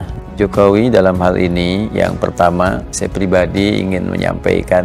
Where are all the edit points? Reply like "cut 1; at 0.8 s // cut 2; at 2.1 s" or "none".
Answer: none